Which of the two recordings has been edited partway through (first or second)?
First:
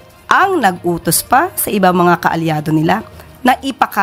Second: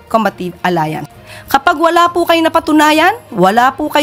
second